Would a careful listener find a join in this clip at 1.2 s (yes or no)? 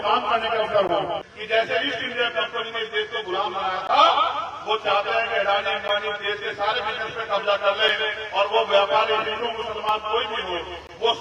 yes